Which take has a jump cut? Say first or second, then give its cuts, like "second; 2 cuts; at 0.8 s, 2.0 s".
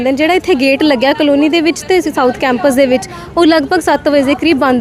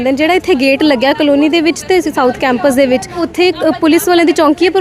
second; 1 cut; at 3.2 s